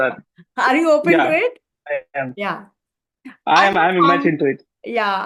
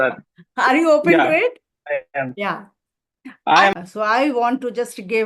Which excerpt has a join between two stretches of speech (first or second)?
second